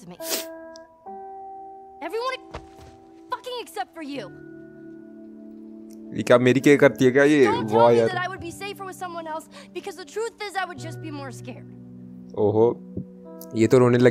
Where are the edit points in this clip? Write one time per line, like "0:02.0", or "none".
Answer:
none